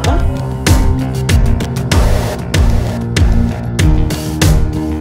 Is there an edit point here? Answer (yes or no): no